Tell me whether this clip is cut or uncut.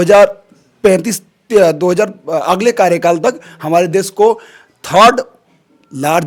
uncut